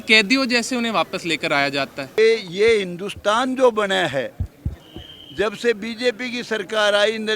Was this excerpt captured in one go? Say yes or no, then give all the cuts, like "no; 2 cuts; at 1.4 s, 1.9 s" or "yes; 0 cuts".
no; 1 cut; at 2.2 s